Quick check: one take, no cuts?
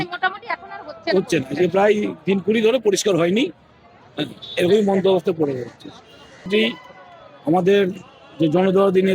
no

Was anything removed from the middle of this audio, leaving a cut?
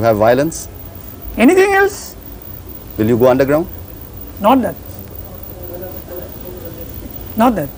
no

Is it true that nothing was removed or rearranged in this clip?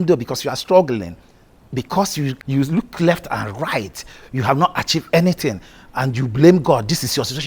no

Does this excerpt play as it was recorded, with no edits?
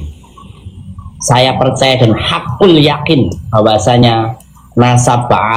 yes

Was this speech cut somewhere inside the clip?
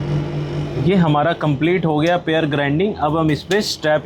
no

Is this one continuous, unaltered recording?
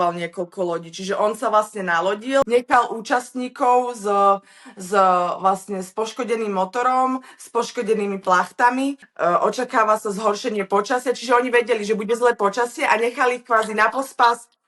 no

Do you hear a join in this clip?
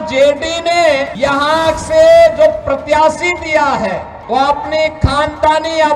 yes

